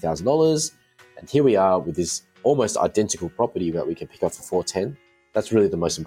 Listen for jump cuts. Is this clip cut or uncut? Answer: uncut